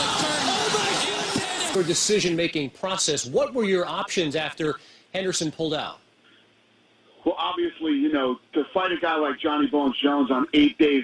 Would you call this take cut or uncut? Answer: uncut